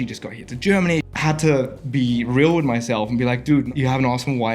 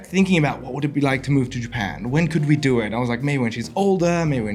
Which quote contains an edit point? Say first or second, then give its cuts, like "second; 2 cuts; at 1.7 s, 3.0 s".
first; 2 cuts; at 1.1 s, 3.7 s